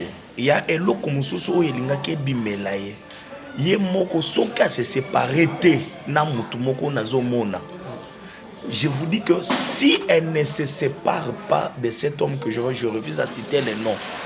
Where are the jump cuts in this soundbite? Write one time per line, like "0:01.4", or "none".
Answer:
none